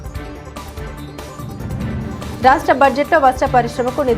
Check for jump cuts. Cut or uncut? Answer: cut